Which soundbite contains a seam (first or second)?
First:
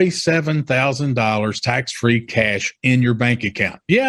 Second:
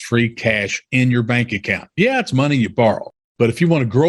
second